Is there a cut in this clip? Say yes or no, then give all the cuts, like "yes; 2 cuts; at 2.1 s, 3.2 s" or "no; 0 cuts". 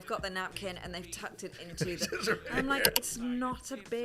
no; 0 cuts